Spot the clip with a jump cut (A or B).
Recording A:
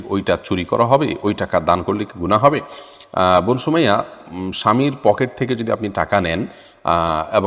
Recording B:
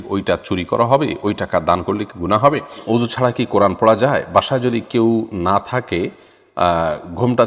B